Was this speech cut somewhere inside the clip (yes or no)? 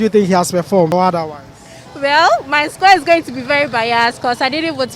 yes